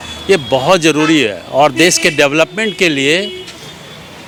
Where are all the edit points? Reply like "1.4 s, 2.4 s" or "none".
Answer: none